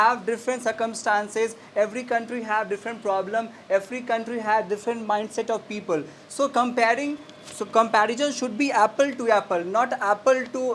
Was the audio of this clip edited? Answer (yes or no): no